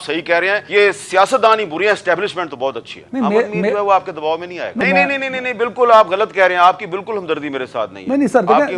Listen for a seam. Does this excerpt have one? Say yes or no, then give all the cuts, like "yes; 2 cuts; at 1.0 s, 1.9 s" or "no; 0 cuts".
yes; 1 cut; at 4.8 s